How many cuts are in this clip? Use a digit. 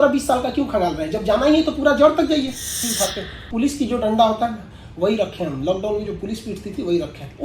1